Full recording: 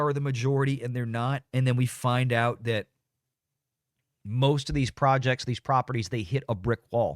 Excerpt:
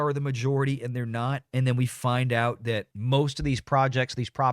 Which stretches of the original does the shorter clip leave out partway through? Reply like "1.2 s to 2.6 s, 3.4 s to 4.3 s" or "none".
2.9 s to 4.2 s